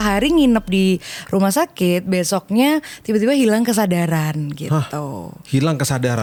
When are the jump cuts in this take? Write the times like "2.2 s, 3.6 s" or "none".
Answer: none